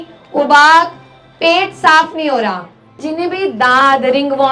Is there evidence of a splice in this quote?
yes; 1 cut; at 3.0 s

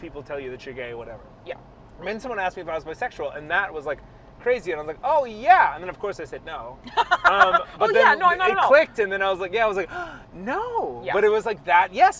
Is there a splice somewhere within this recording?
no; 0 cuts

